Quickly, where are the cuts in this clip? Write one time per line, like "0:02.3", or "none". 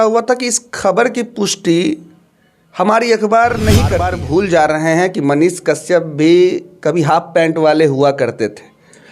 0:04.1